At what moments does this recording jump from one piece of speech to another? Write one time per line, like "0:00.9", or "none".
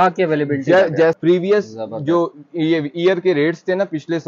0:01.2